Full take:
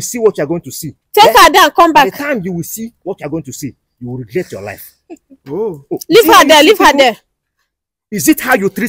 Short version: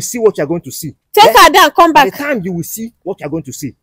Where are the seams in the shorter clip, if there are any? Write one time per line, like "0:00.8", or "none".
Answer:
none